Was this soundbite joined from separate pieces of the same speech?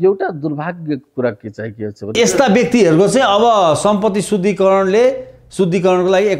yes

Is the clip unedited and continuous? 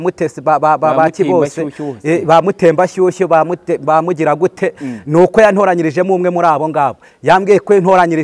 yes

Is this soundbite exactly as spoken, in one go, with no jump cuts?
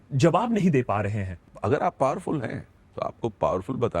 no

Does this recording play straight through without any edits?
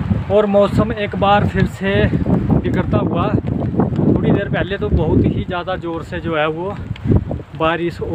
yes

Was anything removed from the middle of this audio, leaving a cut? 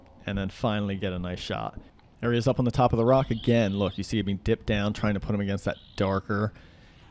yes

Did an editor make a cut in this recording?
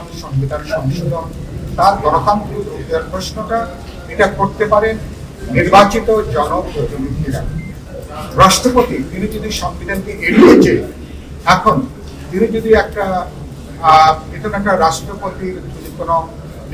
yes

